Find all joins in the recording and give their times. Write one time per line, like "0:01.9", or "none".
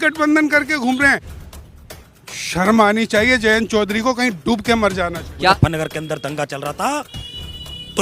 0:05.5